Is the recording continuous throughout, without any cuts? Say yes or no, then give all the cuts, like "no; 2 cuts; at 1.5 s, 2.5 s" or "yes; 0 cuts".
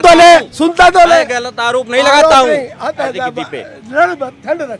yes; 0 cuts